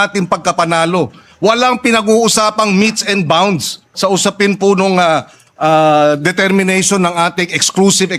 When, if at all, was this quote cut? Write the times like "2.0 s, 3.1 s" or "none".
none